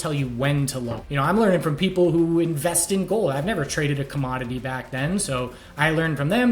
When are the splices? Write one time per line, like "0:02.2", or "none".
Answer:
0:01.0

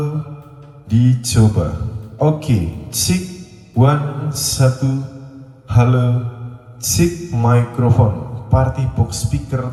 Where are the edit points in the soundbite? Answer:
none

